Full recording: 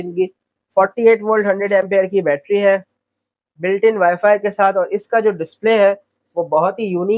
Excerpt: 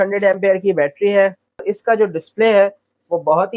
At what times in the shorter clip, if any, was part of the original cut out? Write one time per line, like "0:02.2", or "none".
0:01.7